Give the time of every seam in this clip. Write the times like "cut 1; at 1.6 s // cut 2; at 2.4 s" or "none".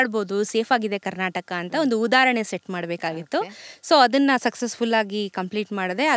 none